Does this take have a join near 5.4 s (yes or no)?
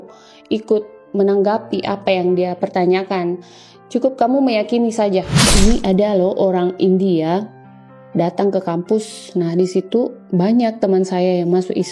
yes